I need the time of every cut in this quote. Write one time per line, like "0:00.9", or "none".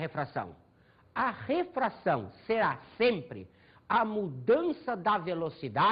0:03.5